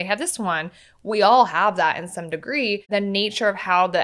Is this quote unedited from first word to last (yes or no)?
no